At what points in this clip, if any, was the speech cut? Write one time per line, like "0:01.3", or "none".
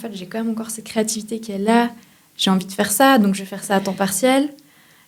none